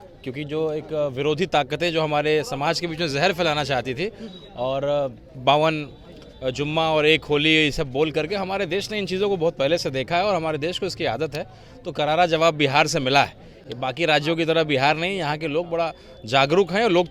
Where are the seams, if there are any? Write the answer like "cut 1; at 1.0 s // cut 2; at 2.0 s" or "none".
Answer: none